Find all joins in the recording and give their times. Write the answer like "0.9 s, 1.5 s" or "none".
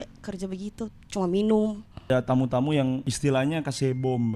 2.1 s, 3.1 s

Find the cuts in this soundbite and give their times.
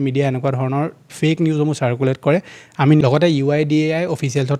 3.0 s

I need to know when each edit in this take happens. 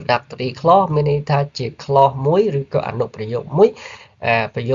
none

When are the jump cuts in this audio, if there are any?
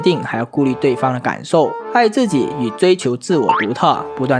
none

